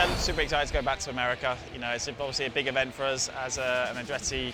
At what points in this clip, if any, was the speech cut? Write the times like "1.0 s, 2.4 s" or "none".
none